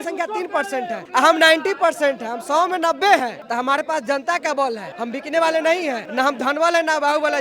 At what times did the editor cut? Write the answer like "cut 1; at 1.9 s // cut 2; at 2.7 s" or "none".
cut 1; at 1.0 s // cut 2; at 3.4 s // cut 3; at 4.9 s // cut 4; at 6.0 s